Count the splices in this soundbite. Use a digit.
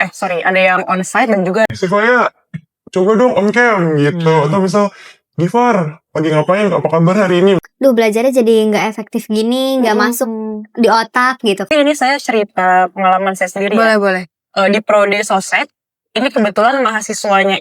3